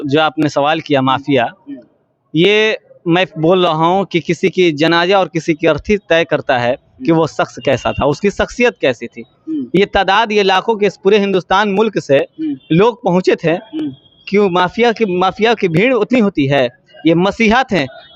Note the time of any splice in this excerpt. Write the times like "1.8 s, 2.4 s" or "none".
none

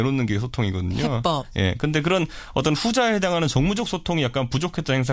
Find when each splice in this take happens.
2.4 s

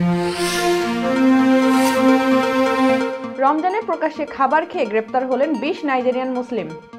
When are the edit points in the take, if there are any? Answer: 3.2 s

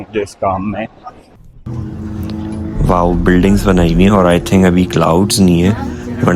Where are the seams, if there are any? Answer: 1.3 s

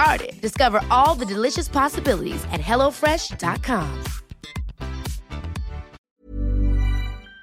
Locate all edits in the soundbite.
6.0 s

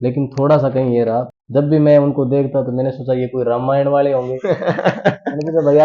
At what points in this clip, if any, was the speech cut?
1.3 s

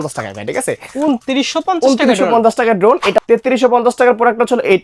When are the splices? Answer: 3.2 s

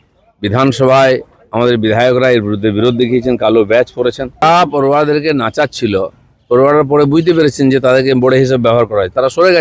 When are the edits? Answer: 4.4 s

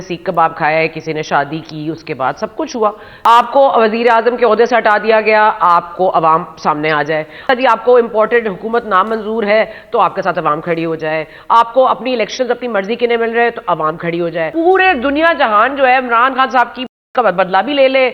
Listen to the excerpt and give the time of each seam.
3.1 s, 7.5 s, 14.5 s

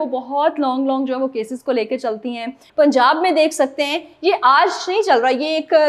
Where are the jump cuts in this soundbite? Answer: 2.6 s

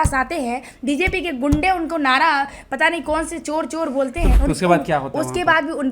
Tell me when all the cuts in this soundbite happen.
4.3 s

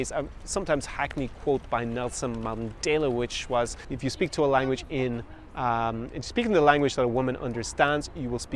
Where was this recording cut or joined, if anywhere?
3.8 s

